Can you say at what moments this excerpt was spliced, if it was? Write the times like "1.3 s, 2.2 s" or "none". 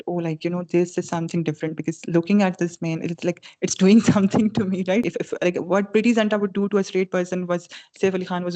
5.2 s